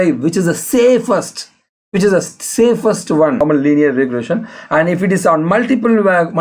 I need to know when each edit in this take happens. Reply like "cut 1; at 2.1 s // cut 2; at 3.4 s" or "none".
cut 1; at 3.4 s